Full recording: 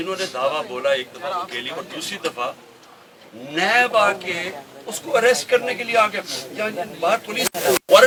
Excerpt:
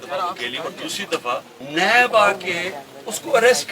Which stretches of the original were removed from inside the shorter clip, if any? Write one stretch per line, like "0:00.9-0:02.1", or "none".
0:02.7-0:03.4